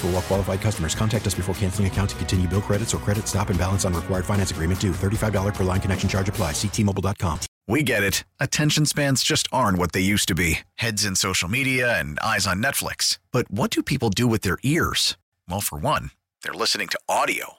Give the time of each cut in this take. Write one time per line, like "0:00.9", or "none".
0:07.5